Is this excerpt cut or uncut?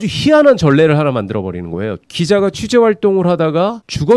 cut